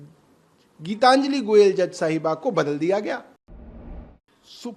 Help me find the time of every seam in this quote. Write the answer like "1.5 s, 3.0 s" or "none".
3.8 s